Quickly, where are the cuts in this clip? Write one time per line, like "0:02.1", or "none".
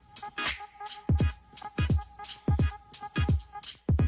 0:01.1